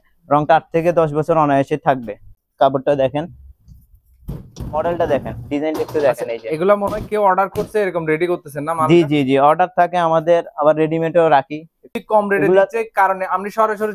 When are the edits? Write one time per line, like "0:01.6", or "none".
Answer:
0:02.4
0:11.9